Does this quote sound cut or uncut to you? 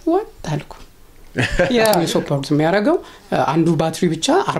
cut